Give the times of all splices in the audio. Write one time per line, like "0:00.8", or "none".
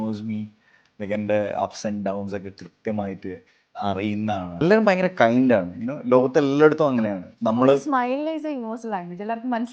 0:04.5